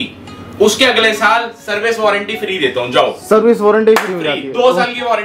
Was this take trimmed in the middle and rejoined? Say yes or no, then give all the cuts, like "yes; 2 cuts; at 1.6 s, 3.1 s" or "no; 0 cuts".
no; 0 cuts